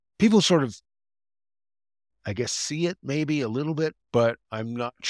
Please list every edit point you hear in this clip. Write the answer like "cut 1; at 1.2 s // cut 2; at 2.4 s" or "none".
cut 1; at 4.0 s